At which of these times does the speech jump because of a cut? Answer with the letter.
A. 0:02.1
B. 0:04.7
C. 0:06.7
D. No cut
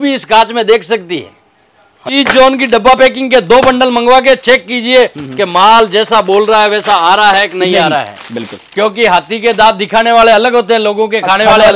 A